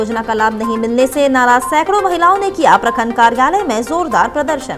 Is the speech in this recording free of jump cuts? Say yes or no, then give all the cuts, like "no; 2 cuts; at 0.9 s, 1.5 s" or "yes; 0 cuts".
yes; 0 cuts